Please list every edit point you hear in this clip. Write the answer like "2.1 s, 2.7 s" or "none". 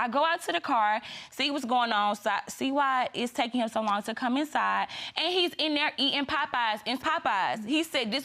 7.0 s